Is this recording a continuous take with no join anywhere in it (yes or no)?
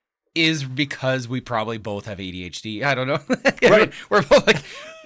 yes